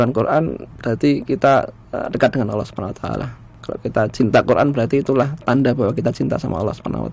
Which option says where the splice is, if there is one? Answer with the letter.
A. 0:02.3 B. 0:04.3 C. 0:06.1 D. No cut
D